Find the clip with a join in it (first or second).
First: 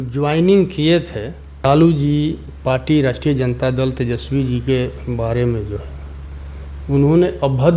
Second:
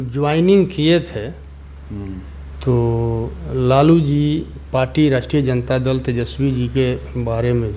first